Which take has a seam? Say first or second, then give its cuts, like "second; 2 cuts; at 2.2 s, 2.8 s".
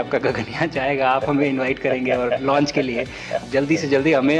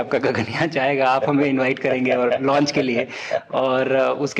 first; 1 cut; at 3.4 s